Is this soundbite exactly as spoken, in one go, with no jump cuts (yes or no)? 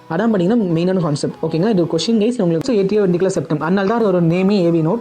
no